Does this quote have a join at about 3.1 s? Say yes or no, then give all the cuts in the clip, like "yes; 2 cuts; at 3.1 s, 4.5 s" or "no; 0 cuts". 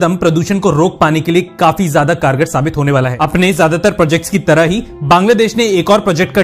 yes; 1 cut; at 3.1 s